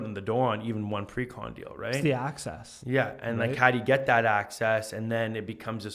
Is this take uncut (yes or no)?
yes